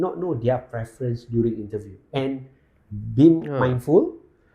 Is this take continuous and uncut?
yes; 0 cuts

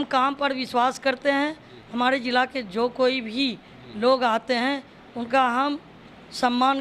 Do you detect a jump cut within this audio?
no; 0 cuts

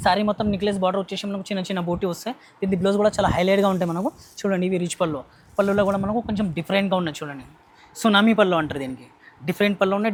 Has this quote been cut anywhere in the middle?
no; 0 cuts

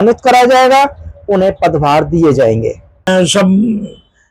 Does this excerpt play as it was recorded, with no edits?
no; 1 cut; at 2.9 s

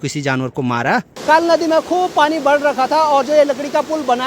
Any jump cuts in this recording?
yes; 1 cut; at 1.1 s

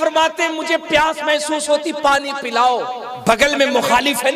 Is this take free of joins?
no; 1 cut; at 3.1 s

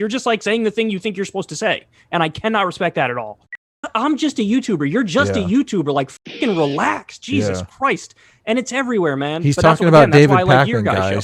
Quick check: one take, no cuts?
no; 1 cut; at 3.7 s

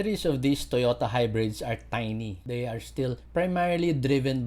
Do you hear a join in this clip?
yes; 1 cut; at 2.5 s

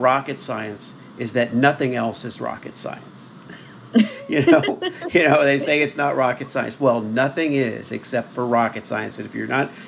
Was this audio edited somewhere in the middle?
no; 0 cuts

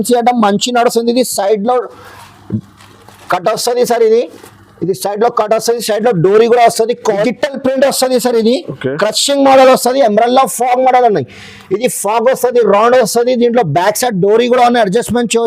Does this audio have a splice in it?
yes; 1 cut; at 7.1 s

